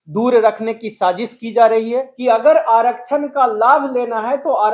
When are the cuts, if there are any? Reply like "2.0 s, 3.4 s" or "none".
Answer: 2.1 s